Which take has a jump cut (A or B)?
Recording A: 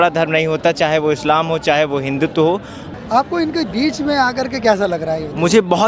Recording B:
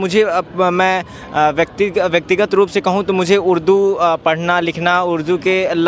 A